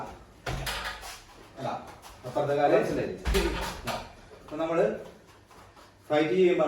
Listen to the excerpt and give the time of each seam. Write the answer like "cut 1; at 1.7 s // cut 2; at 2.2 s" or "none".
cut 1; at 2.9 s